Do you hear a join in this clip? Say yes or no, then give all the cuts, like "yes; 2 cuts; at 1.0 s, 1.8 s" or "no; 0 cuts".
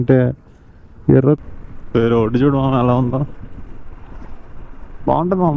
yes; 1 cut; at 1.4 s